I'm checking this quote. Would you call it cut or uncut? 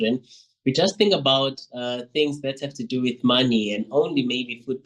uncut